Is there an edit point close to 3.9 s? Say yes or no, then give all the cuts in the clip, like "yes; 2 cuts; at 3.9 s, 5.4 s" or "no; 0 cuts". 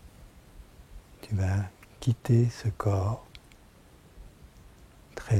no; 0 cuts